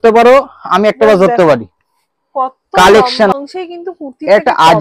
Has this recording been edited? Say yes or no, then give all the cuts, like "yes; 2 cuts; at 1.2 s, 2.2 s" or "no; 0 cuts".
yes; 1 cut; at 3.3 s